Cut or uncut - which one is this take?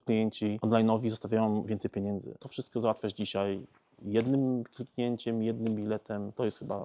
cut